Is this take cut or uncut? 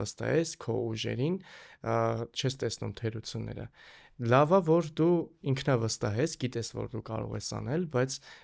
uncut